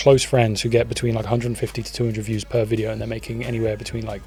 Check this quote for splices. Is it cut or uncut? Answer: uncut